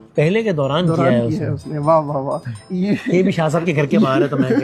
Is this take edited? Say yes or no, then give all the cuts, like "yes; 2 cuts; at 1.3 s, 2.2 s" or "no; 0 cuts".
no; 0 cuts